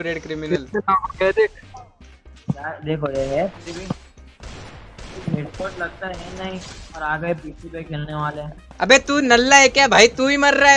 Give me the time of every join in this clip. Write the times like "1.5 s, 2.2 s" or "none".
none